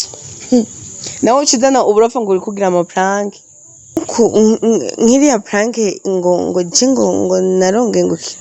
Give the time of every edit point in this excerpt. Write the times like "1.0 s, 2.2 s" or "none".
4.0 s